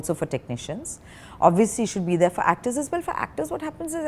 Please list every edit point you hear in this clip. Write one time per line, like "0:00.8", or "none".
none